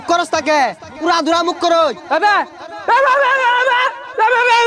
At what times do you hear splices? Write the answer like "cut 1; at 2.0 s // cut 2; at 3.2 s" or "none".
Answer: none